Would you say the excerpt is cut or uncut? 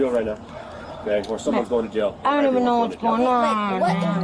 uncut